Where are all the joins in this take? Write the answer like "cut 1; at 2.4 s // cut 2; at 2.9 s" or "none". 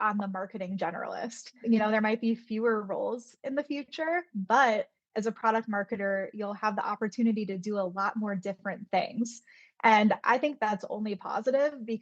cut 1; at 1.6 s